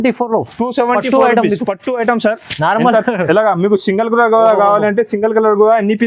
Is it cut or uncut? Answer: uncut